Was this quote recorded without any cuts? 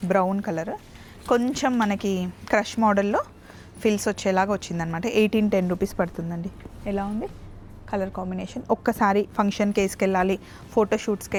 yes; 0 cuts

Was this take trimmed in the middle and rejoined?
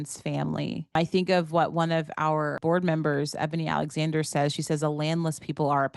yes; 2 cuts; at 1.0 s, 2.6 s

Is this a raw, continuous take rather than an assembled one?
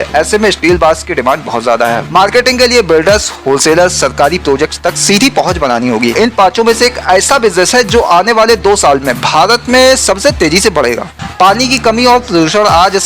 no; 3 cuts; at 2.0 s, 6.1 s, 11.0 s

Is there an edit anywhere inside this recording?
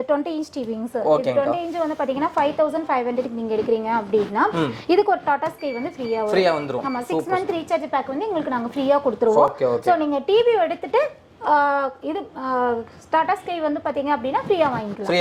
no; 0 cuts

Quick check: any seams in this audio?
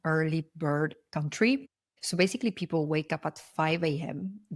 no; 0 cuts

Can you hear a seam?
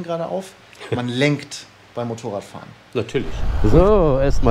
yes; 1 cut; at 3.5 s

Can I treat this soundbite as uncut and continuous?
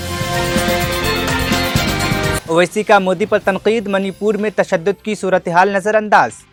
yes; 0 cuts

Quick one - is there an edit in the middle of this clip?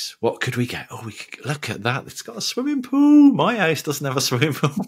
no; 0 cuts

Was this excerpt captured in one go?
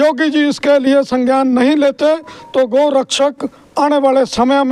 yes; 0 cuts

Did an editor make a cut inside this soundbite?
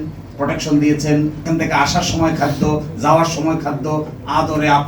yes; 1 cut; at 1.4 s

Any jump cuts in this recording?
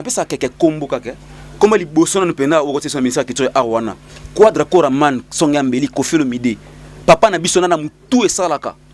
no; 0 cuts

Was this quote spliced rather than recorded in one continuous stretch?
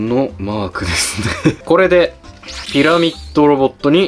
yes; 1 cut; at 1.6 s

